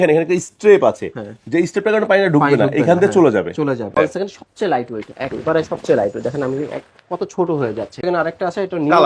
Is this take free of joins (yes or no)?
no